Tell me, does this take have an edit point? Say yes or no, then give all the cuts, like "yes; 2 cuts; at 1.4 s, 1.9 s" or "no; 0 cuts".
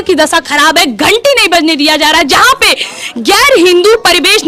no; 0 cuts